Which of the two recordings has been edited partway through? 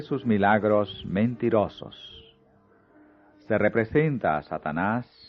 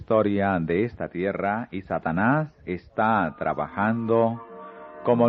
first; 1 cut; at 2.8 s

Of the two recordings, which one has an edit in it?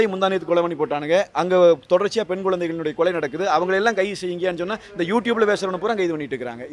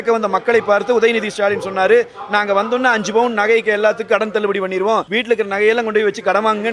second; 1 cut; at 5.1 s

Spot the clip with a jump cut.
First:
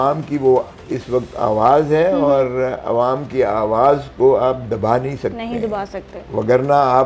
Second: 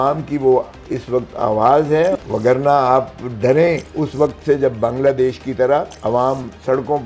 second; 3 cuts; at 2.2 s, 3.9 s, 5.9 s

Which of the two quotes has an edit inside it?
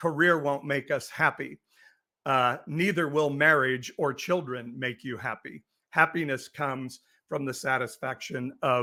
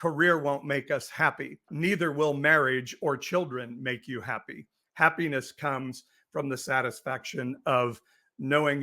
second; 1 cut; at 1.7 s

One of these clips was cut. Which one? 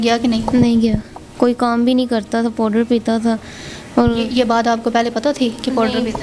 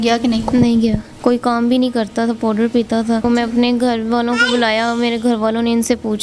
second; 2 cuts; at 1.1 s, 3.3 s

